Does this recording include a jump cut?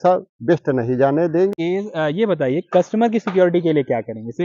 yes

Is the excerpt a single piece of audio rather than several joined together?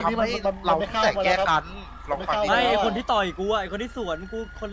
yes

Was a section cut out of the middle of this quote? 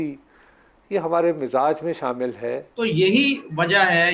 yes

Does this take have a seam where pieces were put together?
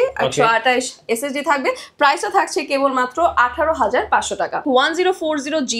yes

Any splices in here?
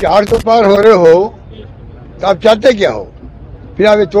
no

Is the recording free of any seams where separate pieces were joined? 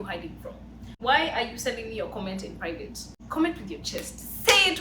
no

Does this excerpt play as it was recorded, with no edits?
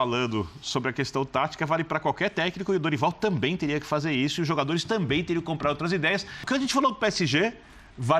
no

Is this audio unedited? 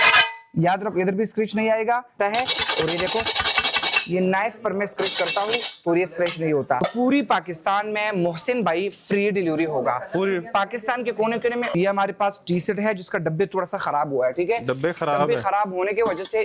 no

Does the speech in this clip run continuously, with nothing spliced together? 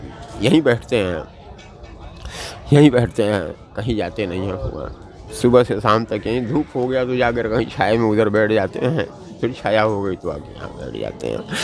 yes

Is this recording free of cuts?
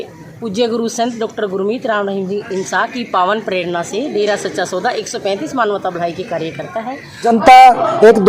no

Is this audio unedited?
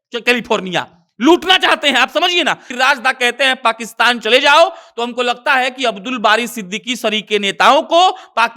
no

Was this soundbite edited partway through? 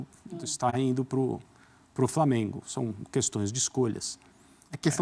no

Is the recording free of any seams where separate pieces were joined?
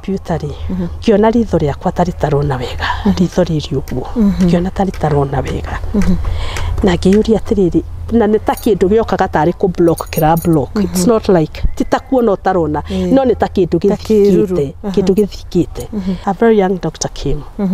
no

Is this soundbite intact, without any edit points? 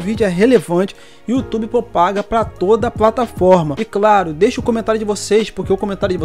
no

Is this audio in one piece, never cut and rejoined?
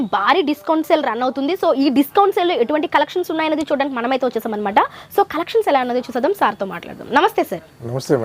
yes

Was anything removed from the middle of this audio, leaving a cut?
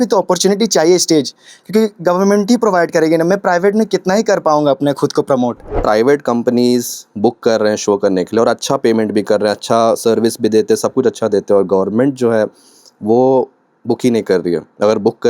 yes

